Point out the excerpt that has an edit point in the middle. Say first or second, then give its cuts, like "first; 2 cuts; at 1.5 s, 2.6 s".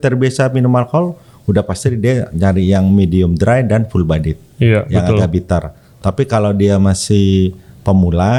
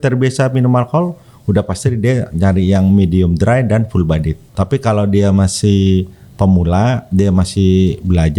second; 1 cut; at 4.4 s